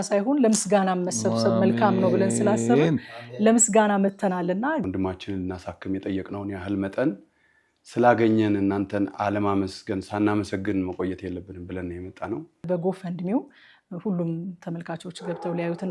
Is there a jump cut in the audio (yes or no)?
yes